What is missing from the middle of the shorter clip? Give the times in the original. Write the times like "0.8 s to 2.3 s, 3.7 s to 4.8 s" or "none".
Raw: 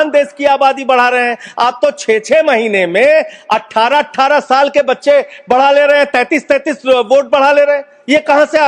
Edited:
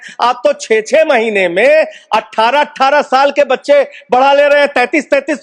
none